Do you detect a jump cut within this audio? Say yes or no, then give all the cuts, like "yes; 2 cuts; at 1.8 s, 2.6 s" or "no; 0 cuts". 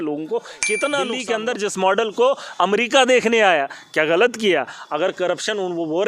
yes; 1 cut; at 1.2 s